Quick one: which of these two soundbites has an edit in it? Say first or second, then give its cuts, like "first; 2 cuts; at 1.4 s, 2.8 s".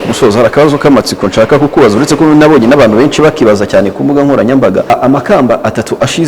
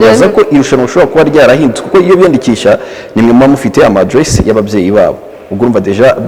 first; 1 cut; at 4.9 s